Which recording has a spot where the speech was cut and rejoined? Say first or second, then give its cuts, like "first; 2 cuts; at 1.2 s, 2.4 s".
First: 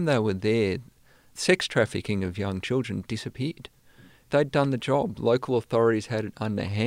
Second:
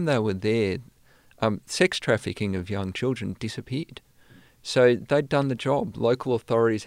first; 2 cuts; at 1.3 s, 4.3 s